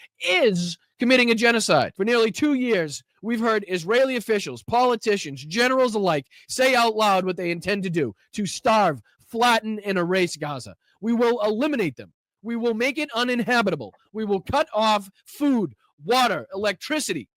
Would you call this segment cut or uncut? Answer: cut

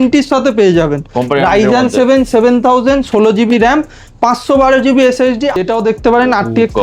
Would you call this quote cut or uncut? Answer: cut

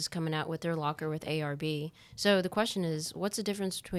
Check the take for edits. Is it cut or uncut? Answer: uncut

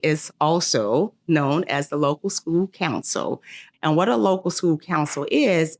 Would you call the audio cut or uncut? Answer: cut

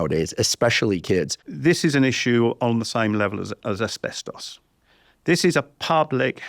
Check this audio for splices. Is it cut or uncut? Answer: cut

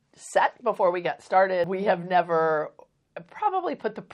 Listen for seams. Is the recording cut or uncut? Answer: cut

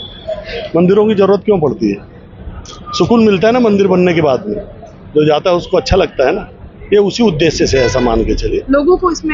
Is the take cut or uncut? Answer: uncut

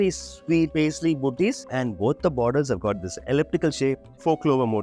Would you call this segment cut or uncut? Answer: cut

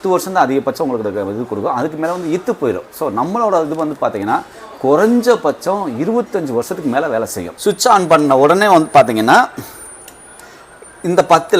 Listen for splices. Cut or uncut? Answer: cut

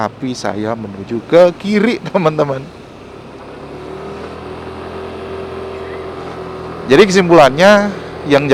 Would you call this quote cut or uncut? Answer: uncut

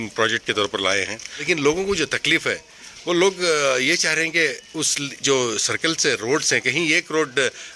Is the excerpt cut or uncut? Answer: cut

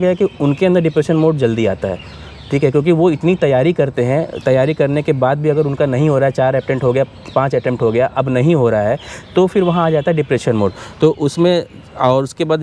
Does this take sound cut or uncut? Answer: uncut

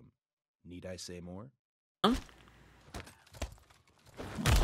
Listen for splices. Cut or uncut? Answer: cut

